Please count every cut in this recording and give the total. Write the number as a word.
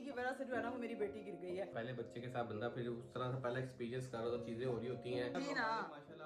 two